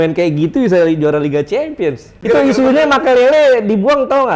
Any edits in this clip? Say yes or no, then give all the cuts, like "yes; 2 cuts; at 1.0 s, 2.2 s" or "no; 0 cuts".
yes; 1 cut; at 2.1 s